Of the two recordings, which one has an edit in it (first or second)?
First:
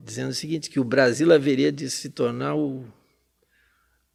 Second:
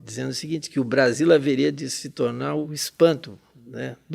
second